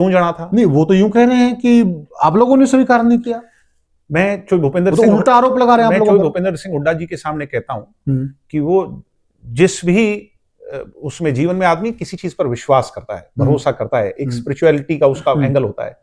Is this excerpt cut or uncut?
uncut